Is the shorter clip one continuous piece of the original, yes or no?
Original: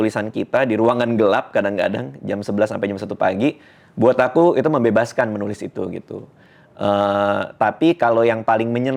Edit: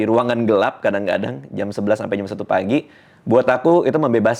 yes